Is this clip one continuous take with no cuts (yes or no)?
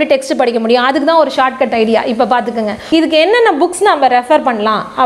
no